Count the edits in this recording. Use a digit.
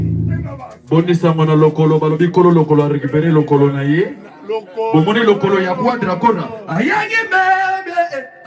0